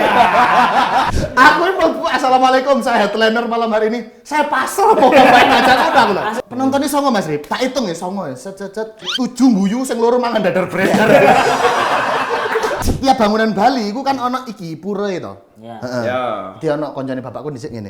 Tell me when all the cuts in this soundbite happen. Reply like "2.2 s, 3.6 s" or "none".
1.1 s, 6.4 s, 9.0 s, 12.8 s